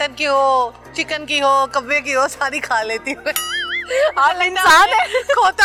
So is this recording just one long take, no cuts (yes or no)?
yes